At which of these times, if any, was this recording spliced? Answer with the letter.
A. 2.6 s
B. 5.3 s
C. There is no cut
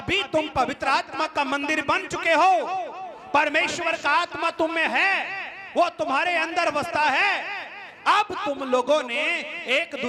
C